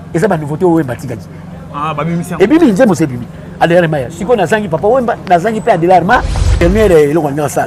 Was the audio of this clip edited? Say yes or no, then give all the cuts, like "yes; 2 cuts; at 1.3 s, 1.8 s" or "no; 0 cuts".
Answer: yes; 1 cut; at 6.6 s